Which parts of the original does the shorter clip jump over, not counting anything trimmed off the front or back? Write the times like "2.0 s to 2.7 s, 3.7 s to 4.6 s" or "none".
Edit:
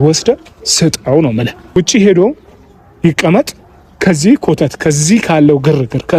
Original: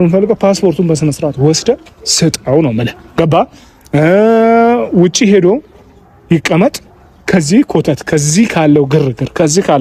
3.2 s to 5.0 s